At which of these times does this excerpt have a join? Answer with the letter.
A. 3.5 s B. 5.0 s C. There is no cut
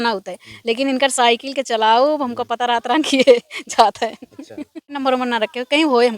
B